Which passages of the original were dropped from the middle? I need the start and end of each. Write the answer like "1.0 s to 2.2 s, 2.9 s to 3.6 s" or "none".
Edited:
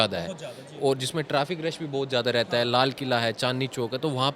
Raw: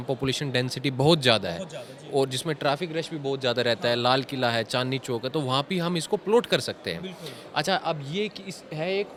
none